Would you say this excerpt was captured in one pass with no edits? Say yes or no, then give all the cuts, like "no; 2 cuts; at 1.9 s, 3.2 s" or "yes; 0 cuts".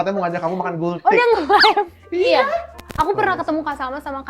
no; 1 cut; at 2.8 s